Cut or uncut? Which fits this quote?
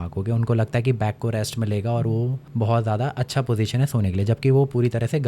cut